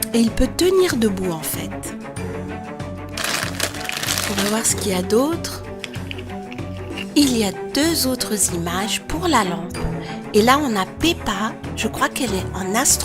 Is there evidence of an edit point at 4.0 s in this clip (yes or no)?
no